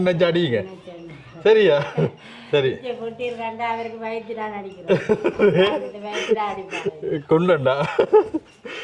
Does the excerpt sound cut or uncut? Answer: uncut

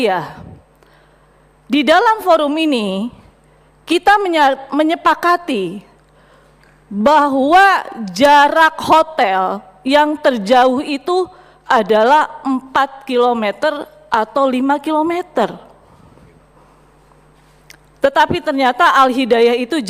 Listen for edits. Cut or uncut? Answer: uncut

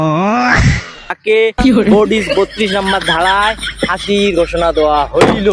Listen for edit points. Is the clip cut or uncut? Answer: cut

